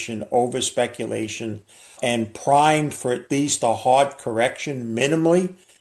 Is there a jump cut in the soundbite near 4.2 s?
no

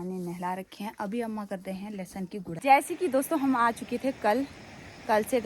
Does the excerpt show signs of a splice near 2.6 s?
yes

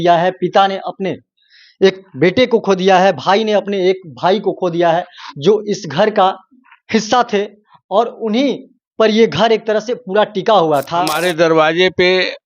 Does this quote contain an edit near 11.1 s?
yes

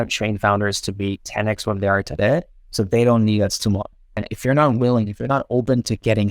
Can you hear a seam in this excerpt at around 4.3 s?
yes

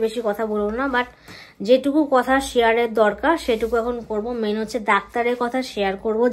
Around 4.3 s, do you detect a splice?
no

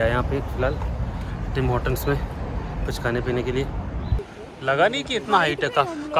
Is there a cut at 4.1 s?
yes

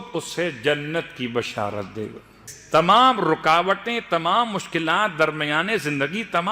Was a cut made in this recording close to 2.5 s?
yes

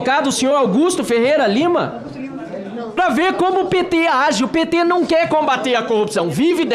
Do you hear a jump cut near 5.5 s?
no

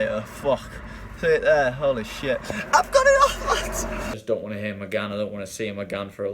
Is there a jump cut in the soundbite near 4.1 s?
yes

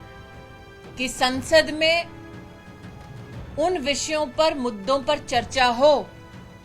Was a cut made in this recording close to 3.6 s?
yes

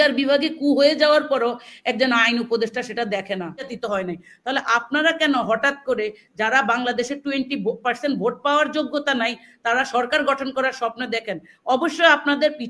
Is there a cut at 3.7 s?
yes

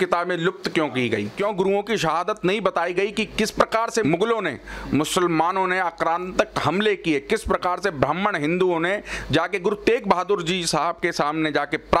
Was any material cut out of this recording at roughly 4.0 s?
yes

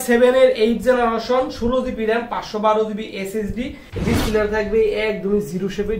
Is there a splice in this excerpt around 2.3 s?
no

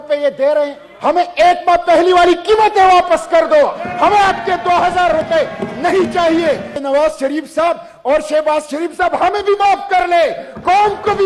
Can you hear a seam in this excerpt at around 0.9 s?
yes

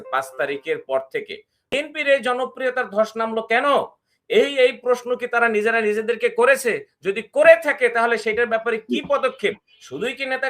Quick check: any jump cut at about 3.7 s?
no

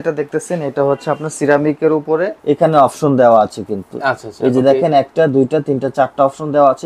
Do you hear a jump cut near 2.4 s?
yes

